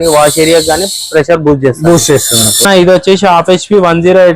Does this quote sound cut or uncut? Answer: cut